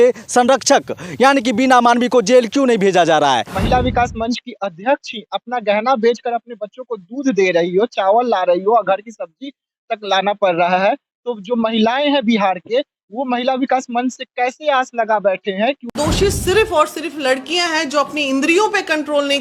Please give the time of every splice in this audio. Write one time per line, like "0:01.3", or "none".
0:03.5
0:15.9